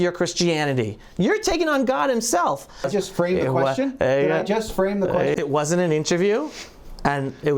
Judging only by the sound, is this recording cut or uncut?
cut